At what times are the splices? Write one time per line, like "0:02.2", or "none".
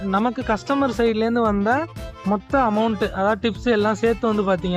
none

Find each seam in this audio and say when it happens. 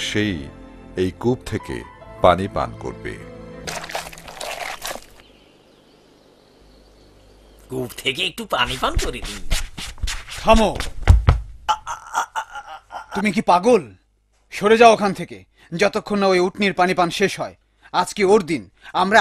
0:12.1

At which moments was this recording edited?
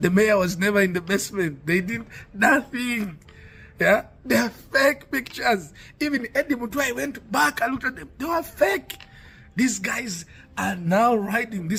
none

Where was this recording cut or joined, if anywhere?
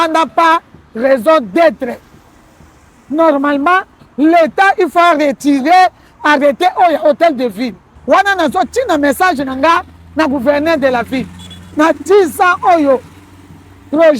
0:07.9

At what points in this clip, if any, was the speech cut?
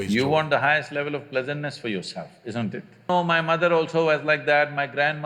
0:03.1

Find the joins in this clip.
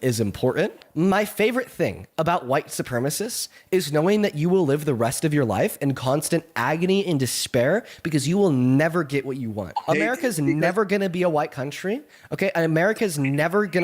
0:00.8
0:09.7

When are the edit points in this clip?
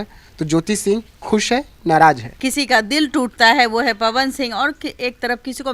0:02.4

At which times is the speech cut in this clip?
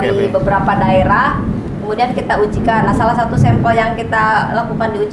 none

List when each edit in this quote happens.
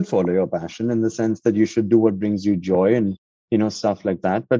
none

